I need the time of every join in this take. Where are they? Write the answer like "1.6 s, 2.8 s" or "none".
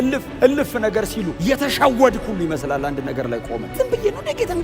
1.3 s, 3.7 s